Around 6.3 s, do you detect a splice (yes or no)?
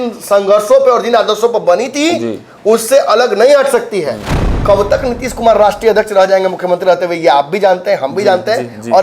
no